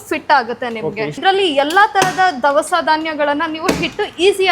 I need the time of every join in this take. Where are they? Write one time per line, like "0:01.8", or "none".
0:01.2